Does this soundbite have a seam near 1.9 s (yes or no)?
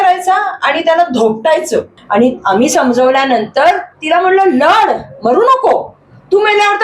yes